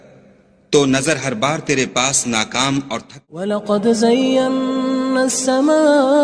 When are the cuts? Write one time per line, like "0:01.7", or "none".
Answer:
0:03.3